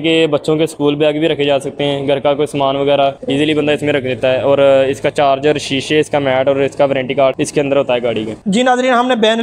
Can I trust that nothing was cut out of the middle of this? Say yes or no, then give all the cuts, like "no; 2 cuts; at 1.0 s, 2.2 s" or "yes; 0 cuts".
no; 1 cut; at 8.4 s